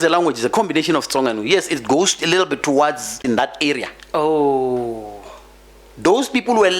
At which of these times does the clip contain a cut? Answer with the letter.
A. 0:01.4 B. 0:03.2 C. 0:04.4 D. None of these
B